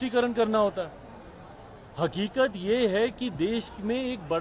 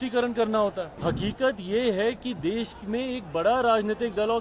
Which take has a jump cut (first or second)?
second